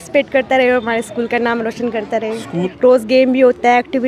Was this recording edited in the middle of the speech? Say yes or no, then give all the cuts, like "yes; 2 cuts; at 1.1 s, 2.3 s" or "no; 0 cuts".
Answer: yes; 1 cut; at 2.7 s